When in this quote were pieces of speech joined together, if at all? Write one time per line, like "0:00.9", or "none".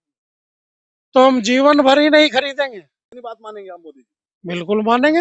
0:03.1